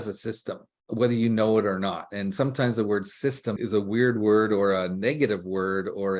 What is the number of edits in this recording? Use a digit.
1